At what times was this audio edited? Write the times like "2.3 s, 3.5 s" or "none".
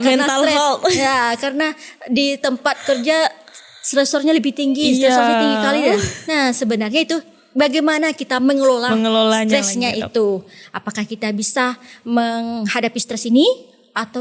none

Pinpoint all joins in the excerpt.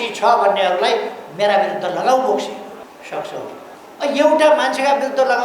2.8 s, 3.8 s

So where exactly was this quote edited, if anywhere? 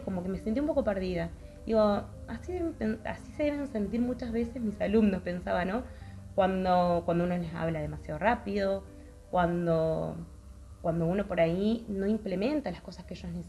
none

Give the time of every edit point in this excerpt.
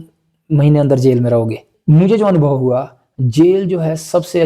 1.7 s

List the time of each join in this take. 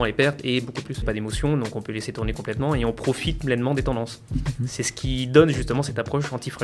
1.0 s

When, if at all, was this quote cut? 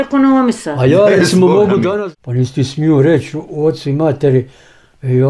2.0 s

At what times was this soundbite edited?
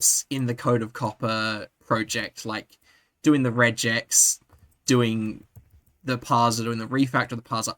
1.7 s

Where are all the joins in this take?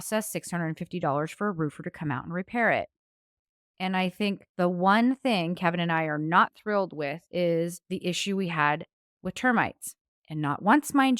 3.9 s, 7.2 s, 7.8 s

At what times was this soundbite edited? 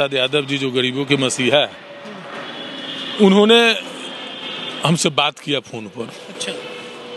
none

